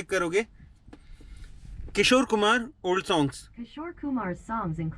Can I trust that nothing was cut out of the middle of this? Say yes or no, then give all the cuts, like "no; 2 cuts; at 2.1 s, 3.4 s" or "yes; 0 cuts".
no; 1 cut; at 3.8 s